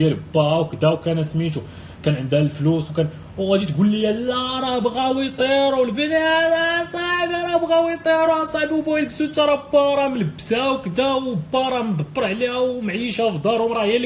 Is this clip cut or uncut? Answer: uncut